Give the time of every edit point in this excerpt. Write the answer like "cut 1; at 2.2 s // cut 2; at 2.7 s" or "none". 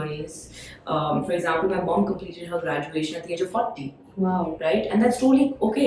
none